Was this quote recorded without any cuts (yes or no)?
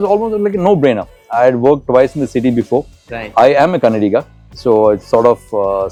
yes